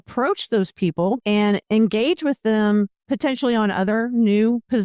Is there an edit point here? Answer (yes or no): yes